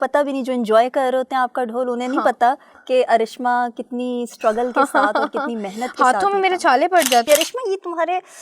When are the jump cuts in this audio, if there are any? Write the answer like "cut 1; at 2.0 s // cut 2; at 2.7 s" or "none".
cut 1; at 7.3 s